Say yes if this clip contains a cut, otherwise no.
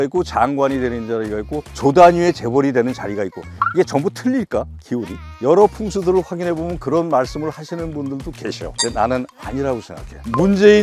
yes